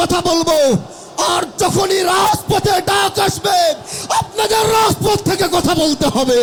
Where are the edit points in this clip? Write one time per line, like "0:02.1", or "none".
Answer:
none